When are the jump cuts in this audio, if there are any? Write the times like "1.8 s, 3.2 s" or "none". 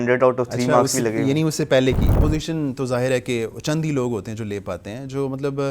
2.1 s